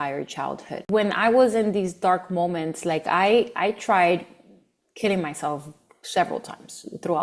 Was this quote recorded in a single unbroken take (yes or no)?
no